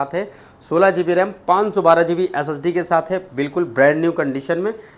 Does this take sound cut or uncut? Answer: uncut